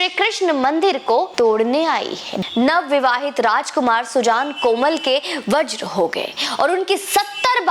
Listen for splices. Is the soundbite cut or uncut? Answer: cut